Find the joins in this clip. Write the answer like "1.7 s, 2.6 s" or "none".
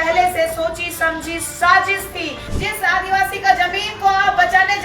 2.5 s

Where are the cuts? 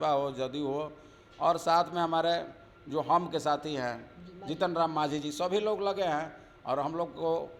none

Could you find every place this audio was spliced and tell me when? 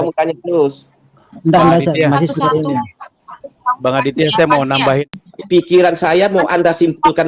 5.1 s

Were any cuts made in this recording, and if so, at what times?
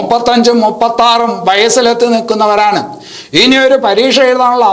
none

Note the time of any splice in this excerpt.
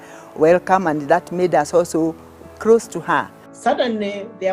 3.4 s

